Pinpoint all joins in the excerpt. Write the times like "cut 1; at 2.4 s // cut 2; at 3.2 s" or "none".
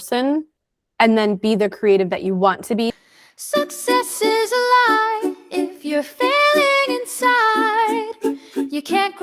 cut 1; at 3.0 s